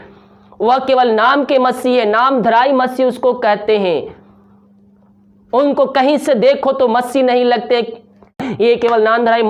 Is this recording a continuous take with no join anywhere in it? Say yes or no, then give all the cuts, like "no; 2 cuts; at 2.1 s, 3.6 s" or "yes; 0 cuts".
no; 1 cut; at 8.4 s